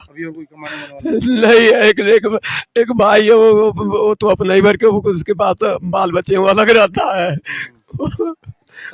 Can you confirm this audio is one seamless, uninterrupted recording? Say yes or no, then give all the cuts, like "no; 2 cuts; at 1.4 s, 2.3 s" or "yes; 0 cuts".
yes; 0 cuts